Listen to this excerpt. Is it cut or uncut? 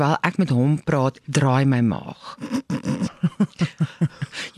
cut